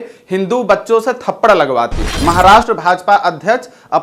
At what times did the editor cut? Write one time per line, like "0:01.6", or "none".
0:02.0